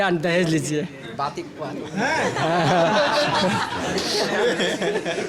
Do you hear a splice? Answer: no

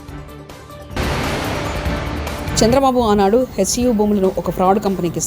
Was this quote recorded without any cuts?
no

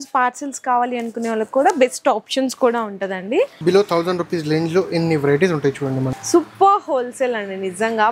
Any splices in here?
yes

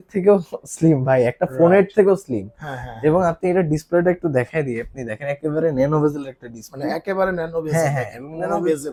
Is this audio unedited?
yes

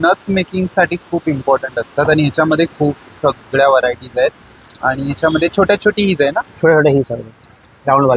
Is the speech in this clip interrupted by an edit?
no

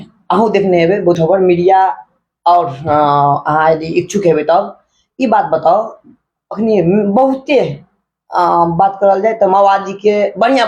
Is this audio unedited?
no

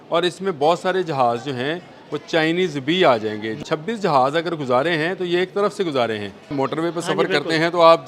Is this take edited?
yes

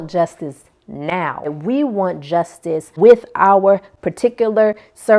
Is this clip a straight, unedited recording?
no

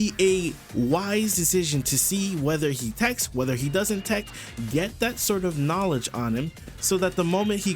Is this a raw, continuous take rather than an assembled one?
yes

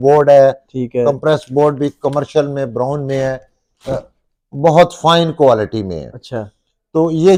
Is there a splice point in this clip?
no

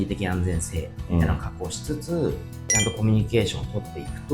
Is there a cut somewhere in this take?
no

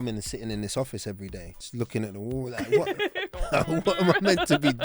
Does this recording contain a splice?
no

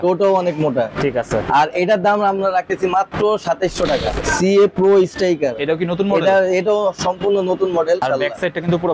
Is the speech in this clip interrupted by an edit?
yes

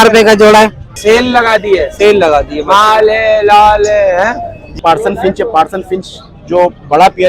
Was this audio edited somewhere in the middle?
yes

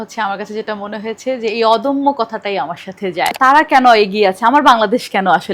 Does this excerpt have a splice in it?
yes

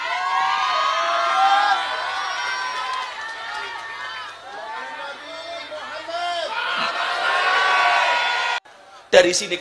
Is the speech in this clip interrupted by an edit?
yes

